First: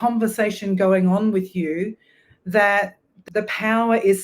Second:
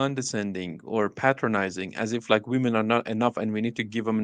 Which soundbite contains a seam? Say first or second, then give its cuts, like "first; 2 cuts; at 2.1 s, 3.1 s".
first; 1 cut; at 3.2 s